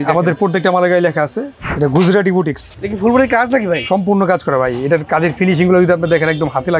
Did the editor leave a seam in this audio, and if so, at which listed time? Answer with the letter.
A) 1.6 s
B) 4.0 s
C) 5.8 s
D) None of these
A